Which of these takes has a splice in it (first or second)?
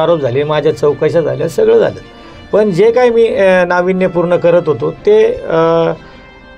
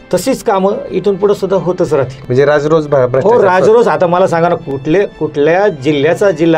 second